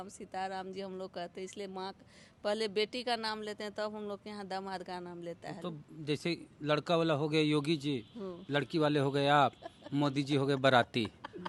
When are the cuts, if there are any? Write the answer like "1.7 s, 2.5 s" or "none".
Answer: none